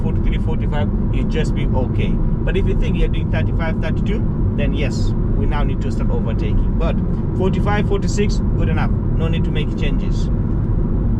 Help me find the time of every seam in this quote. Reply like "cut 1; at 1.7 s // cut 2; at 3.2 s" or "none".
none